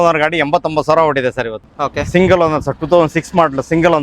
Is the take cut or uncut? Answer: cut